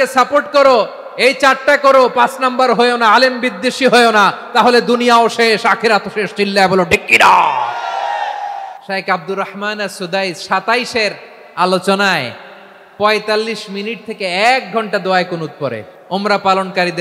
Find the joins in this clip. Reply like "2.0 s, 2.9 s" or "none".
8.7 s, 15.9 s

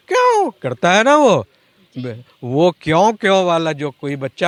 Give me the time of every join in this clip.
none

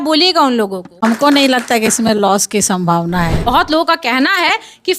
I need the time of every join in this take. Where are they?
1.0 s, 3.5 s

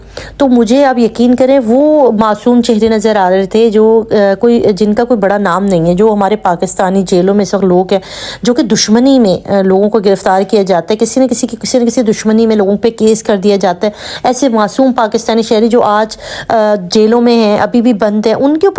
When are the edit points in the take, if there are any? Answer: none

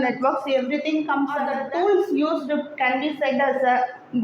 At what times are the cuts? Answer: 1.5 s

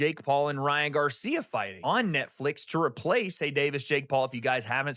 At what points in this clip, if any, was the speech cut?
3.4 s

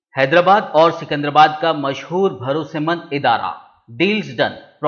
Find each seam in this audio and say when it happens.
none

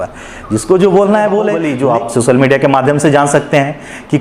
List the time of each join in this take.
1.7 s

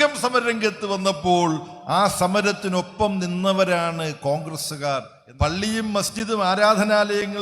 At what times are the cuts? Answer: 5.2 s

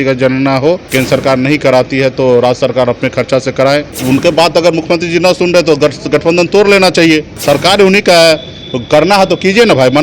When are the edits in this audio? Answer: 0.9 s, 3.9 s, 7.4 s

